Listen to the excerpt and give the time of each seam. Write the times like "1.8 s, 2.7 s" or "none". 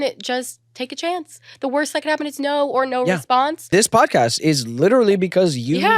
3.7 s